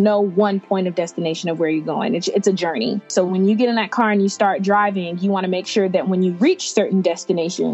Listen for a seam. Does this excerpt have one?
yes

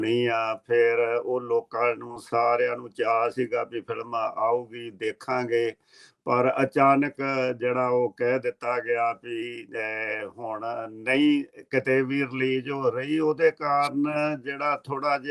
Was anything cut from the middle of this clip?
no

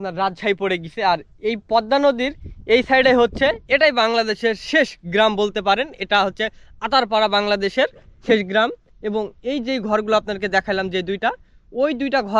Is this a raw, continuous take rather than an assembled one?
yes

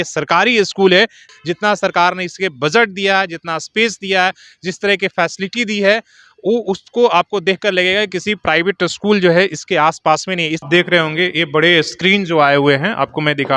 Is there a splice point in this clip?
yes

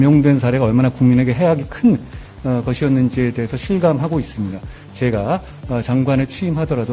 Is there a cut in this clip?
no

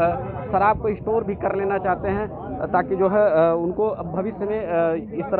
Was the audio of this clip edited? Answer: no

